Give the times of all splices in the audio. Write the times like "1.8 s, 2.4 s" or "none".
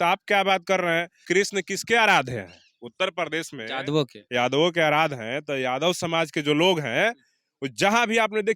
1.2 s